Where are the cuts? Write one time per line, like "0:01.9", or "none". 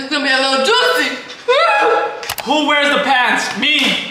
0:02.3